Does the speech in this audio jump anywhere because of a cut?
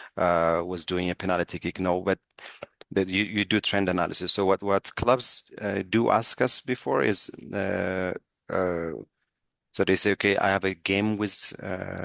no; 0 cuts

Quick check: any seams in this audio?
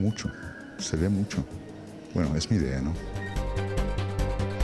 yes; 1 cut; at 3.1 s

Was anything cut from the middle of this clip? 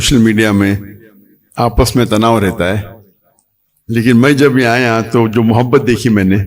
no; 0 cuts

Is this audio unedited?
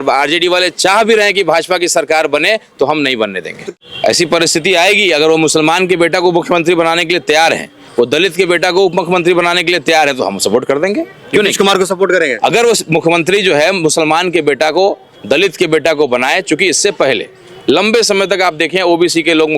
no; 1 cut; at 3.6 s

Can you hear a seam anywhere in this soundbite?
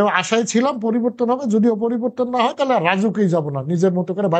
no; 0 cuts

